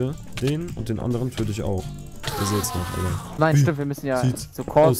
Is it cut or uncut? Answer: cut